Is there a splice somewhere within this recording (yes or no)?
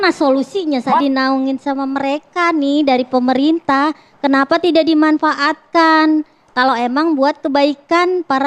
yes